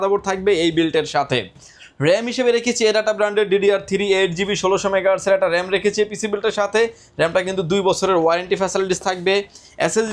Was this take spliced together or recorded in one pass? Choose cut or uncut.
uncut